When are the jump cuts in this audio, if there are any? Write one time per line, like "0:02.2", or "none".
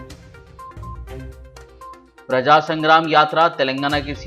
0:02.1